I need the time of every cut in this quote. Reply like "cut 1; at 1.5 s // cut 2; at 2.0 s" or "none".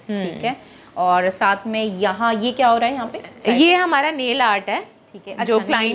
none